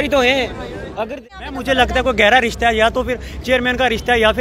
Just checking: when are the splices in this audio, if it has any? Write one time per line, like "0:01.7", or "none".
0:01.3